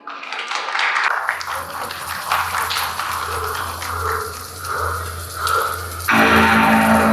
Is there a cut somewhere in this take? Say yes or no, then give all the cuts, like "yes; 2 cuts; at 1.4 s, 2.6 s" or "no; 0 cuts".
yes; 1 cut; at 1.1 s